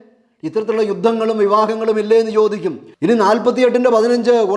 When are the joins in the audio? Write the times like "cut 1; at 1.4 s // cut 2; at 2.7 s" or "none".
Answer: cut 1; at 2.9 s